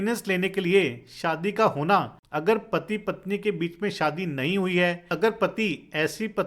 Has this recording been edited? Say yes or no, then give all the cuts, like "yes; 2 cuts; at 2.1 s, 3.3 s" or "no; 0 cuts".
yes; 2 cuts; at 2.2 s, 5.1 s